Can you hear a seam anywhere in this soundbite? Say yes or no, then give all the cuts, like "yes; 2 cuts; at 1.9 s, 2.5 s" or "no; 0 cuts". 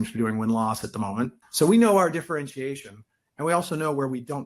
yes; 1 cut; at 1.4 s